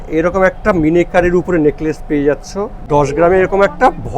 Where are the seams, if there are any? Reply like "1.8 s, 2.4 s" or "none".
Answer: 2.8 s